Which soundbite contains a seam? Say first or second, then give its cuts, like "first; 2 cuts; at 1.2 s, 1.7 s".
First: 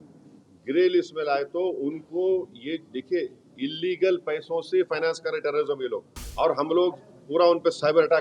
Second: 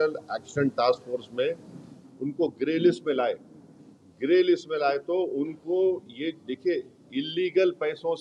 first; 1 cut; at 6.2 s